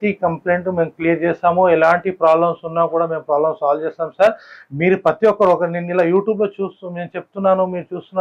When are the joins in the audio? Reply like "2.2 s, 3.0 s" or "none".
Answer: none